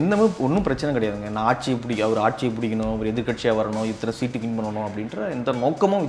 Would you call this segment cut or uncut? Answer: uncut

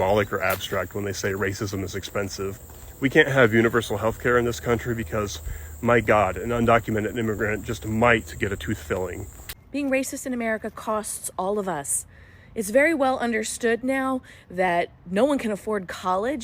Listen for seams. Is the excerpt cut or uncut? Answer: cut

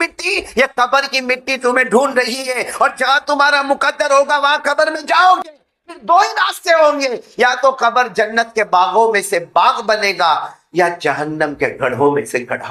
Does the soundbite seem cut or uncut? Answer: uncut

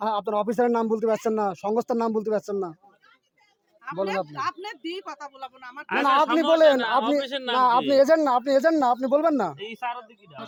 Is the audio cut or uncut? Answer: uncut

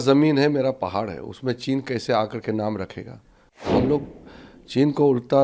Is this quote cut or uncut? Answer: cut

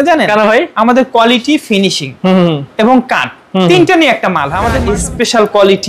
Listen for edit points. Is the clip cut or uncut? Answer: cut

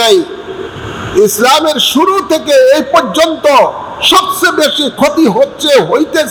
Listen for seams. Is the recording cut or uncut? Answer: uncut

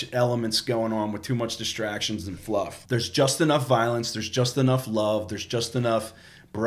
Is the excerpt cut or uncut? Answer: cut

